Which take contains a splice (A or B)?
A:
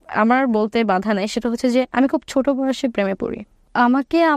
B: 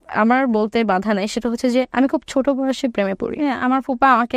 B